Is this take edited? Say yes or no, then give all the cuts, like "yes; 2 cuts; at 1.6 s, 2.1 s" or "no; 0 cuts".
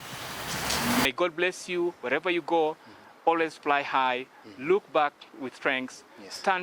yes; 1 cut; at 1.1 s